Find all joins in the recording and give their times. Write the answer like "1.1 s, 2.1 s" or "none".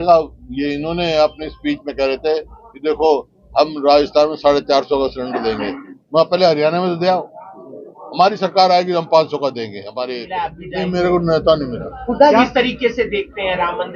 10.6 s